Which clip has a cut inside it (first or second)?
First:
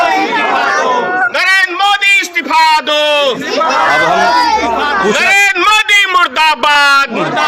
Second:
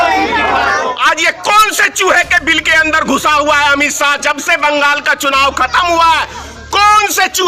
second